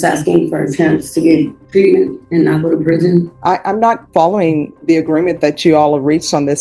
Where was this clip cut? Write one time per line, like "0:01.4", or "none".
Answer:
0:01.6
0:02.2
0:03.3
0:04.7